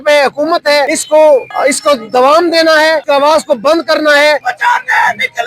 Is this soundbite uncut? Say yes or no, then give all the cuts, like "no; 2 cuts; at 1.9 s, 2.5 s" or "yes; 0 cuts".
no; 4 cuts; at 1.0 s, 1.5 s, 3.0 s, 4.5 s